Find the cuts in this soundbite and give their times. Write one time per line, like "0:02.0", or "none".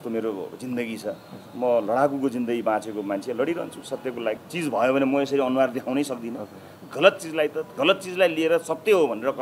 0:04.5

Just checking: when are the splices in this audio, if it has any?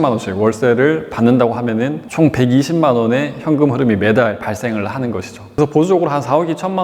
0:02.0
0:05.6

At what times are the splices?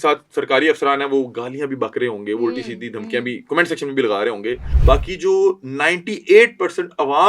0:04.7

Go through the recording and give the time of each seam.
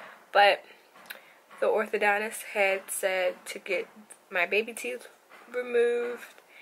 none

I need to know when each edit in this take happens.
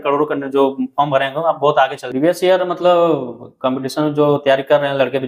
0:02.0

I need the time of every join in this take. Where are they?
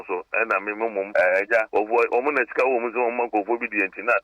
0:01.1
0:01.7

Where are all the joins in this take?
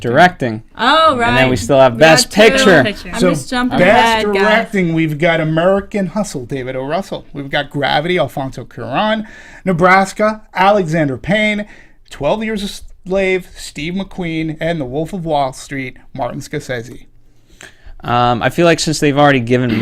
0:13.6

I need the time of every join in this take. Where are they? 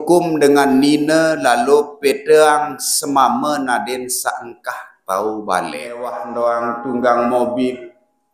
0:06.2

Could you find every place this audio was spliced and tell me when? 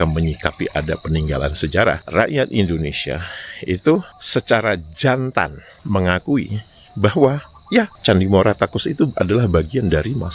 none

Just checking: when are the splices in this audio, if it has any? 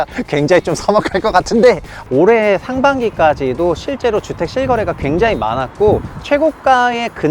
0:01.9

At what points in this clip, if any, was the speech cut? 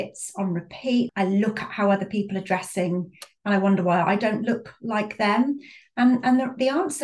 0:01.1

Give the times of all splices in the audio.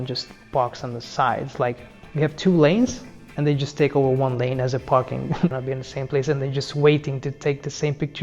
0:05.6

